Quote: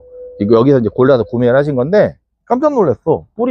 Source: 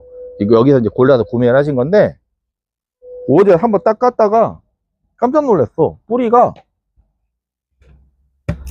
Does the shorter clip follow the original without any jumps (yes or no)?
no